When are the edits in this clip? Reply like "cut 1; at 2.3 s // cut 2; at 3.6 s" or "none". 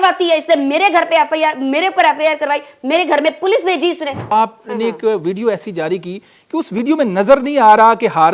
cut 1; at 4.3 s